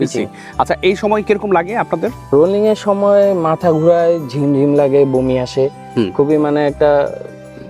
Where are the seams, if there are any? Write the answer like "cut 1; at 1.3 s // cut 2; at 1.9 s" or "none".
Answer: none